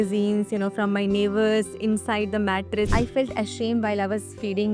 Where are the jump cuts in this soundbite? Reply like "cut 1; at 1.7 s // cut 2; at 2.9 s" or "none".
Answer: cut 1; at 2.9 s

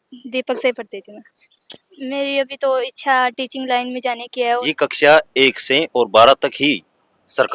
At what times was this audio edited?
cut 1; at 1.5 s // cut 2; at 4.6 s

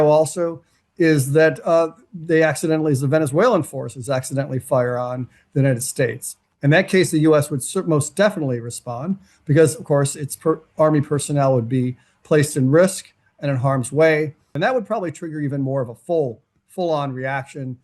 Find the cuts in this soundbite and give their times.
cut 1; at 14.5 s

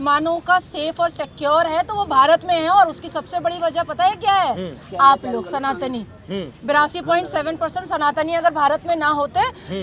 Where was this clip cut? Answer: none

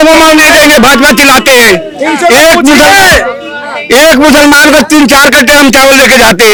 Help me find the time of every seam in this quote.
none

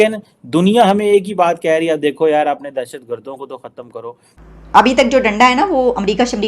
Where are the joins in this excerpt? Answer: cut 1; at 4.4 s

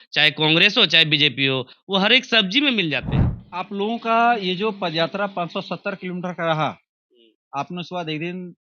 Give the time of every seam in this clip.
cut 1; at 3.4 s

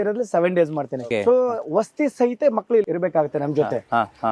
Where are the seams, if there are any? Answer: cut 1; at 1.0 s // cut 2; at 2.9 s

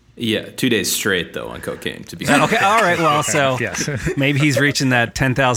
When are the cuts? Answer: cut 1; at 2.3 s

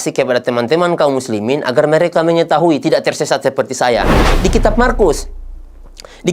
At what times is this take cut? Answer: cut 1; at 4.2 s

